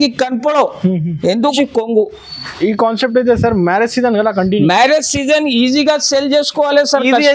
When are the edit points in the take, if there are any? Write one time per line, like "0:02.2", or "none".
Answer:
0:01.5